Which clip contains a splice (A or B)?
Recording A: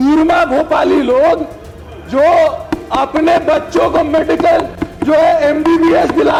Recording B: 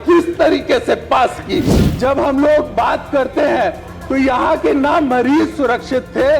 B